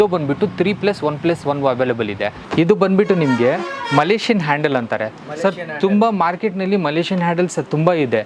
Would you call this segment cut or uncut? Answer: cut